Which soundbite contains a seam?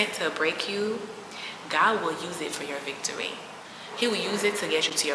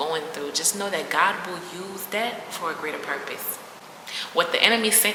first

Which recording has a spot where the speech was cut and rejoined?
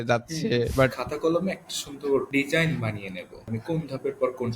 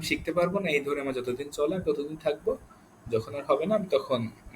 first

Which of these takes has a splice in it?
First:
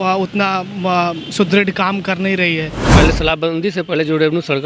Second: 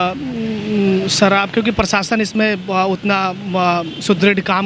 first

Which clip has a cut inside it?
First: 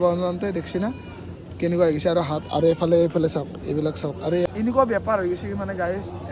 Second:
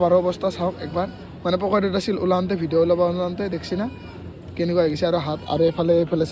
first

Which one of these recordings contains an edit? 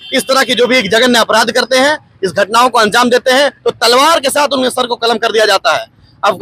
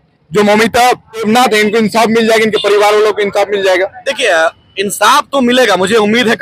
second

